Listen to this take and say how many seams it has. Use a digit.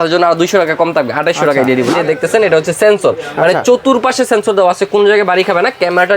1